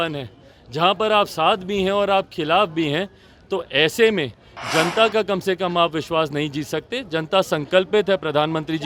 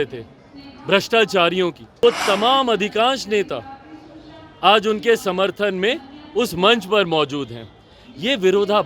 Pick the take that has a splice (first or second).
second